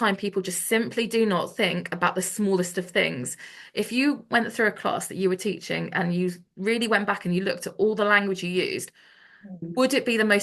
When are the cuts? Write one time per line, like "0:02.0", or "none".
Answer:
none